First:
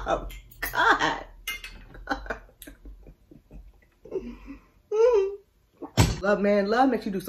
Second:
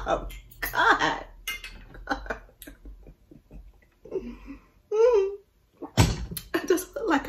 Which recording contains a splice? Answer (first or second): first